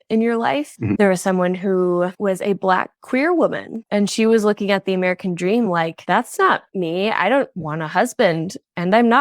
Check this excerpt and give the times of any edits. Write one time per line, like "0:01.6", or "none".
0:01.0